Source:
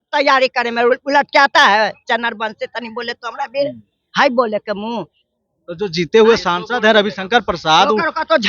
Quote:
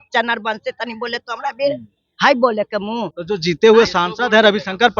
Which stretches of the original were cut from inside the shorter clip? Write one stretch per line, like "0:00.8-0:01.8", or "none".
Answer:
0:05.1-0:05.7